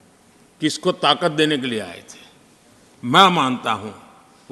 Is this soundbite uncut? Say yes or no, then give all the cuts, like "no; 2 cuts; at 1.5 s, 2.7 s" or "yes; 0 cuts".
yes; 0 cuts